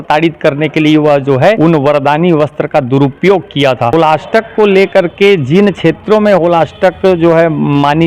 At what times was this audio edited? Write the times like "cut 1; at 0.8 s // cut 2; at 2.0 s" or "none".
cut 1; at 1.6 s // cut 2; at 3.9 s